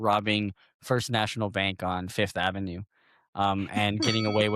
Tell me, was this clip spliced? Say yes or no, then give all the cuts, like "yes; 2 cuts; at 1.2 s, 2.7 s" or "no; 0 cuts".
no; 0 cuts